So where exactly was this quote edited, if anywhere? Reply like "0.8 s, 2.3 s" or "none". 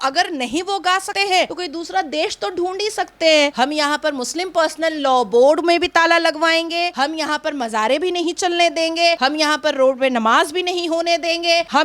1.2 s, 3.5 s